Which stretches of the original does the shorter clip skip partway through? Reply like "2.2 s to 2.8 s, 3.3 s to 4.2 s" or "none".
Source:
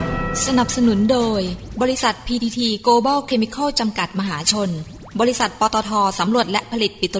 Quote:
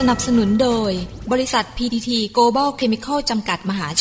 none